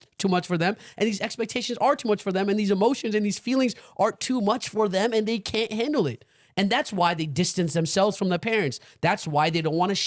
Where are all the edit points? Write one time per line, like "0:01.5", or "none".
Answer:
none